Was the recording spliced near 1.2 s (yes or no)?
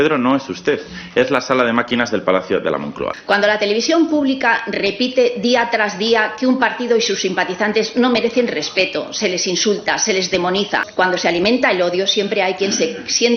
no